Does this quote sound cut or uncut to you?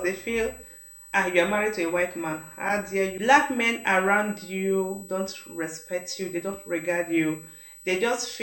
cut